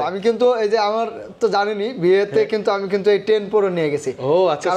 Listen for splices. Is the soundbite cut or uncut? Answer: uncut